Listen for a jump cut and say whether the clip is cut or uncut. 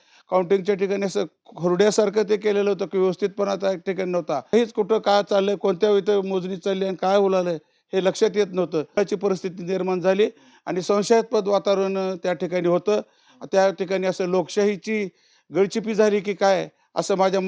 cut